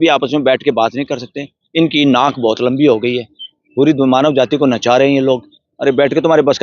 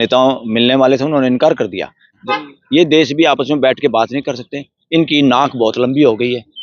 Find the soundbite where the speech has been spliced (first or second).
second